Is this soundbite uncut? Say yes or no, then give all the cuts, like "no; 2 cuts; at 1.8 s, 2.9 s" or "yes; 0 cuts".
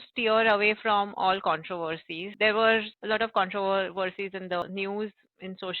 no; 3 cuts; at 2.3 s, 2.9 s, 4.6 s